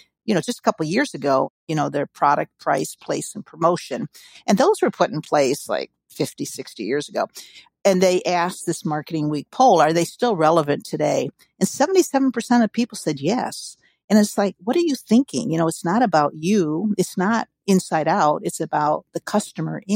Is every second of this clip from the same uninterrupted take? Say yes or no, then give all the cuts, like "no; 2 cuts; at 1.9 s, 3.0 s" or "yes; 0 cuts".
no; 1 cut; at 1.6 s